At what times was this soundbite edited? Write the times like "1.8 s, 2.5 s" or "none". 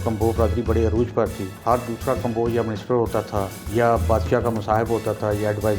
1.5 s, 3.6 s